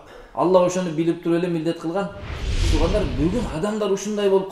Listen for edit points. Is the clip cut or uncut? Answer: cut